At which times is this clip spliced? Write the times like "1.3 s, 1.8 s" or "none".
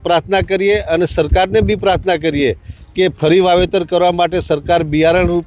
none